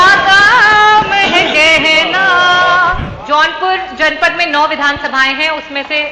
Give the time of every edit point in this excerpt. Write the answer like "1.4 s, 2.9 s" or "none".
3.1 s